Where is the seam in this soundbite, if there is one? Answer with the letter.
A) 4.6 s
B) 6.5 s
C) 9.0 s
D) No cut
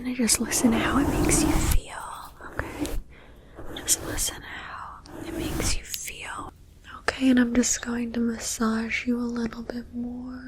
B